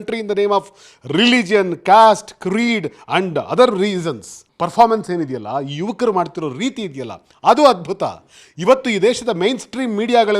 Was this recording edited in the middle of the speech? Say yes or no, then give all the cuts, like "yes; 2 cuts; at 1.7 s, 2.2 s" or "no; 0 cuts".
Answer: yes; 1 cut; at 4.4 s